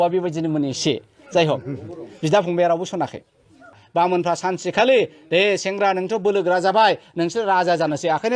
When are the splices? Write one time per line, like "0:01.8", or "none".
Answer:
0:03.8